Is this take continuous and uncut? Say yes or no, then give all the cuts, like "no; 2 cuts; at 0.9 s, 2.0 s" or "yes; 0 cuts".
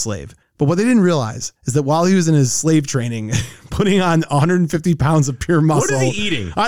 yes; 0 cuts